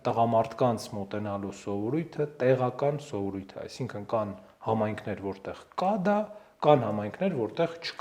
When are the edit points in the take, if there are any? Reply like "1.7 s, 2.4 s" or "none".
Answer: none